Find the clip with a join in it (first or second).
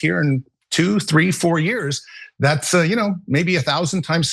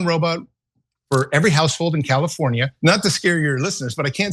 second